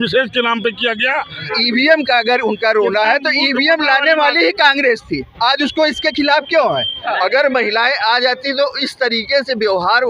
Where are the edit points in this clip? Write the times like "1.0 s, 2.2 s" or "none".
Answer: 1.5 s, 6.9 s